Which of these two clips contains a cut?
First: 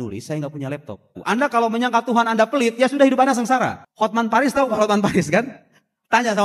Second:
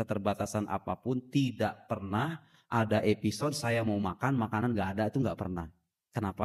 first; 2 cuts; at 1.2 s, 3.8 s

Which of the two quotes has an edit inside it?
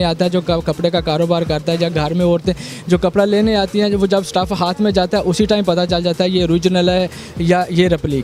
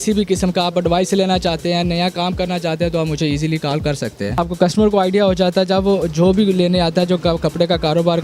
second; 1 cut; at 4.4 s

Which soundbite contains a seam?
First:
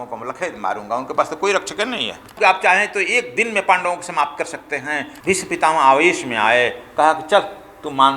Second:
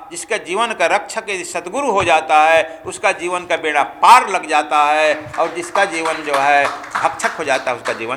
first; 2 cuts; at 2.4 s, 5.1 s

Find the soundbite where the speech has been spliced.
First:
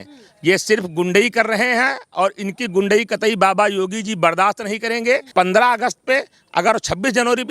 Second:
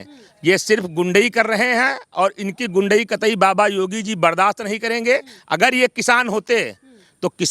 first; 1 cut; at 5.3 s

